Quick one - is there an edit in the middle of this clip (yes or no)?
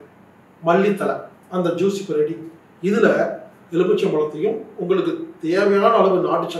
yes